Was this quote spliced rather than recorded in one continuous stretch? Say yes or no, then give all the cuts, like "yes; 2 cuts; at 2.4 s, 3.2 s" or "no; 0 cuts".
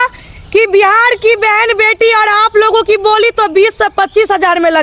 no; 0 cuts